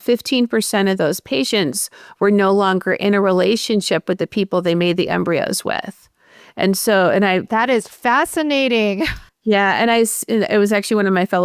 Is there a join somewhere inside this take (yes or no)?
no